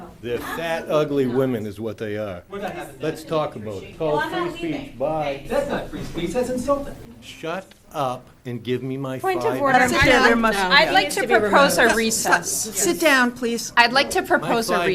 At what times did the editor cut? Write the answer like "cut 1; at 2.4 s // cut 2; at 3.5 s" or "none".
cut 1; at 3.9 s // cut 2; at 7.0 s